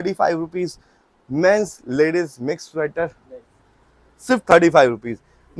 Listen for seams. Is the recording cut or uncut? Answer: uncut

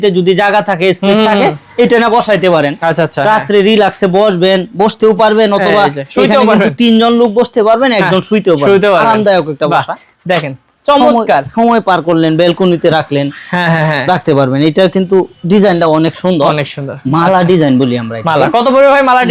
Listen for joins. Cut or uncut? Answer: uncut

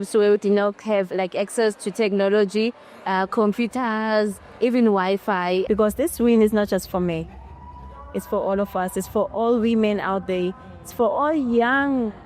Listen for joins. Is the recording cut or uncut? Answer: cut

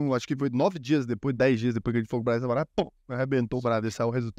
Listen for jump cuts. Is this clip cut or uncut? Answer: uncut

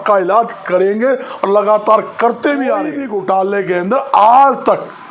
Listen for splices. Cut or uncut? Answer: cut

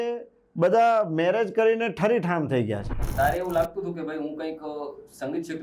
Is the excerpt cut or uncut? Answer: cut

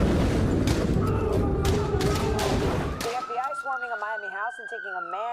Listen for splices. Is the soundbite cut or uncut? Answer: uncut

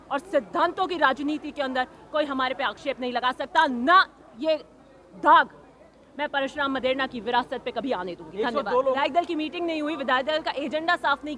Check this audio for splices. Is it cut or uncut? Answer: uncut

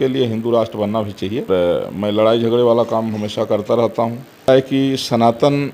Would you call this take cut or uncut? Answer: cut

